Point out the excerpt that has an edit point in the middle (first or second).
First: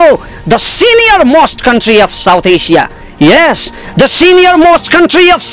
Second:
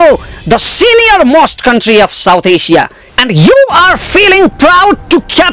second